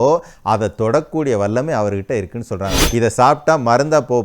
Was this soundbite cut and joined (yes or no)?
yes